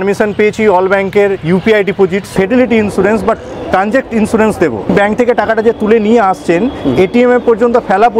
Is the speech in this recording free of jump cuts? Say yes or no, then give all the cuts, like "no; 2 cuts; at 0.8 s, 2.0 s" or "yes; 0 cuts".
no; 2 cuts; at 2.3 s, 4.9 s